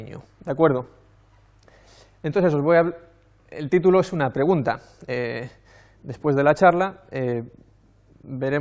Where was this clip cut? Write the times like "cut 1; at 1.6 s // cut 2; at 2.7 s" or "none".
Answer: cut 1; at 7.1 s